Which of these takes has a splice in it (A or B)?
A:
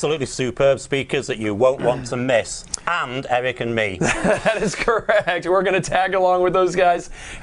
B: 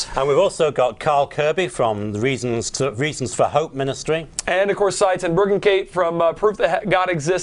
B